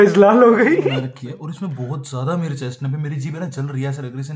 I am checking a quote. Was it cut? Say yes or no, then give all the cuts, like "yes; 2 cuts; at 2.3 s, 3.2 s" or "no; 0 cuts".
yes; 1 cut; at 1.0 s